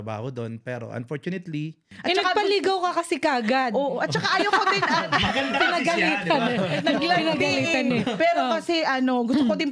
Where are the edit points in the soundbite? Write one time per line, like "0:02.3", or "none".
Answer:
0:01.9